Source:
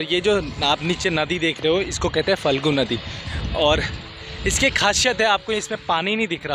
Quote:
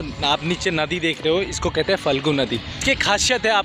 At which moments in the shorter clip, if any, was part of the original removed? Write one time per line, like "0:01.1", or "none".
0:02.7